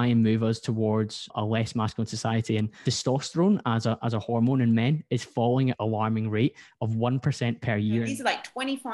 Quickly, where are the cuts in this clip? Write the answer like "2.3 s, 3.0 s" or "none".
1.3 s, 2.8 s, 5.8 s, 8.1 s